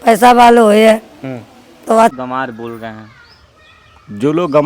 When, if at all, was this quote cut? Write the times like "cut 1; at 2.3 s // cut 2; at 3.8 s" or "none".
cut 1; at 2.2 s